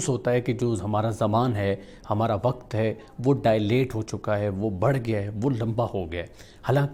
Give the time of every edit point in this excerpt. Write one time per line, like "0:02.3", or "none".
none